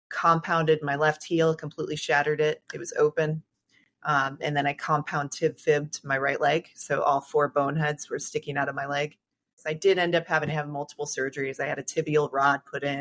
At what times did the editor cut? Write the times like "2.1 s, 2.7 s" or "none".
9.6 s